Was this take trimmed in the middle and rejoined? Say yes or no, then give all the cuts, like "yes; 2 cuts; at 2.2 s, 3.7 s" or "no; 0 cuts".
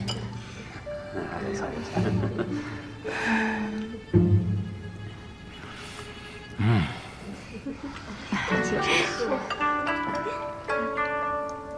no; 0 cuts